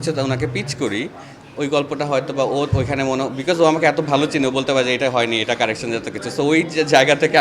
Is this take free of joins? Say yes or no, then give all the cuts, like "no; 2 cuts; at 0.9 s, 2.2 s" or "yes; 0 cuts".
yes; 0 cuts